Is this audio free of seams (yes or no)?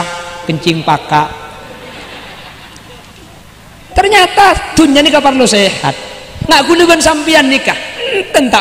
no